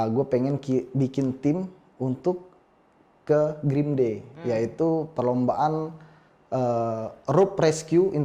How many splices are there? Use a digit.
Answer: 0